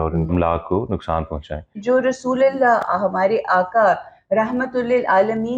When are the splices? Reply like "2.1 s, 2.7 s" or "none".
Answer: 1.8 s